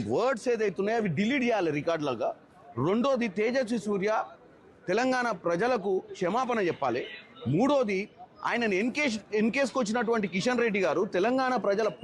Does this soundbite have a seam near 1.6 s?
yes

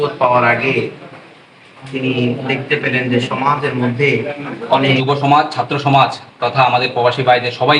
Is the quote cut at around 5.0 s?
yes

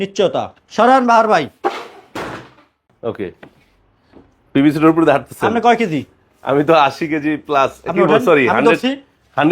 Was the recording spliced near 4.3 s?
no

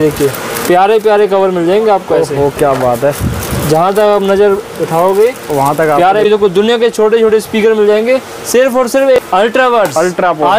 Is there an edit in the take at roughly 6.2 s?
yes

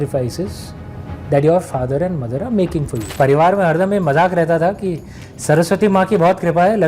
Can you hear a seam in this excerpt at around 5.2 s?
no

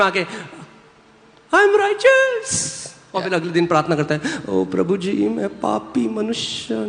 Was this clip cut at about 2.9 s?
no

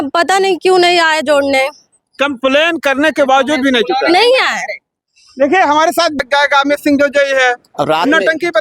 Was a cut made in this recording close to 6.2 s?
yes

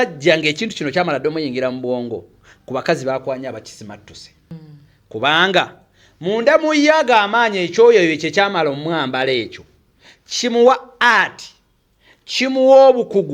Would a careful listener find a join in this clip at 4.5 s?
yes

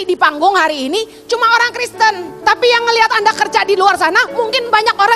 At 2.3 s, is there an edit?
yes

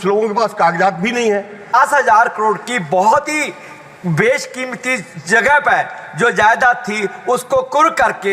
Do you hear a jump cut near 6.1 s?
no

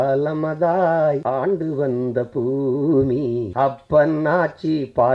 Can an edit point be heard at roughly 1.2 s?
yes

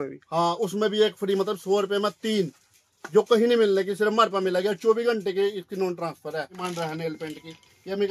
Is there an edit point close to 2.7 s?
no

